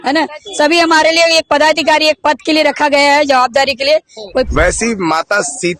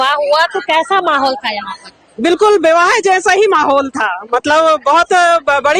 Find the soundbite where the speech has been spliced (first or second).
first